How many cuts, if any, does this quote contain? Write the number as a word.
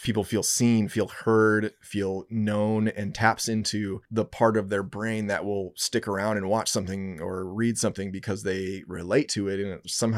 zero